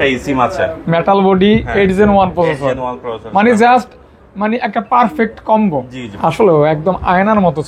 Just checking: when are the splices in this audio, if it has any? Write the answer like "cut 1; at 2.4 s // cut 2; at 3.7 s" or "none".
cut 1; at 6.0 s